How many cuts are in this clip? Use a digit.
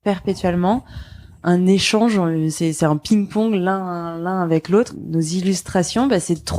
1